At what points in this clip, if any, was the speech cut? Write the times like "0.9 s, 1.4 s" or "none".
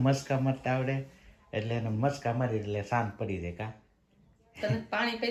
none